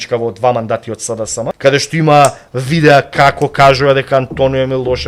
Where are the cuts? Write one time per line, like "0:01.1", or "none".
0:01.5